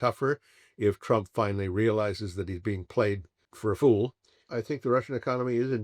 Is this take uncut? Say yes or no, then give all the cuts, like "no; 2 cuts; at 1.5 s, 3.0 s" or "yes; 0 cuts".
no; 2 cuts; at 3.5 s, 4.5 s